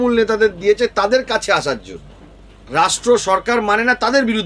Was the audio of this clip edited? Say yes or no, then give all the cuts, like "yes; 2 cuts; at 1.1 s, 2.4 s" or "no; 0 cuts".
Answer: yes; 1 cut; at 2.5 s